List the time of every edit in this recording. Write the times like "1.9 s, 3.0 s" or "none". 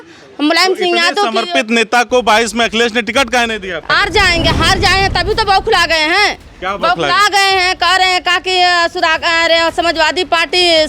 3.9 s